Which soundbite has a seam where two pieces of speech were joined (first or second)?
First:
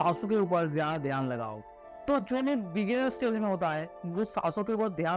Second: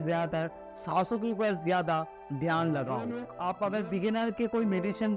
second